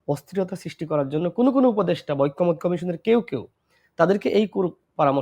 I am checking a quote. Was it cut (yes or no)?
no